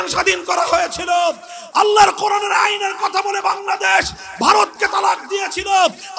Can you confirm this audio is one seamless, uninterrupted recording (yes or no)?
yes